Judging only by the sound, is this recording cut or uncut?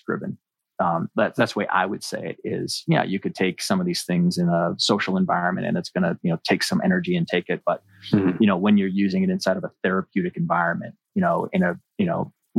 uncut